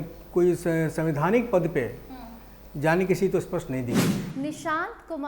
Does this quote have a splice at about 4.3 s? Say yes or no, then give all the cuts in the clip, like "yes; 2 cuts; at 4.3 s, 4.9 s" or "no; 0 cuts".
yes; 1 cut; at 4.3 s